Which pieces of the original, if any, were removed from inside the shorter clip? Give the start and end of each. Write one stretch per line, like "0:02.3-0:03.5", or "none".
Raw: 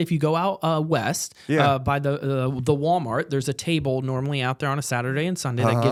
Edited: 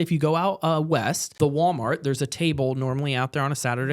0:01.3-0:02.6